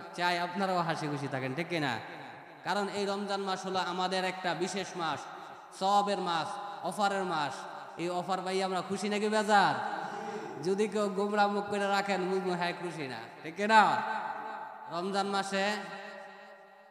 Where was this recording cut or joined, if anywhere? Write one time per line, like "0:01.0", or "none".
0:14.8